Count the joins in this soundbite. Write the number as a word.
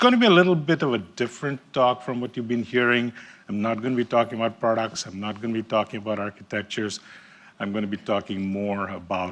one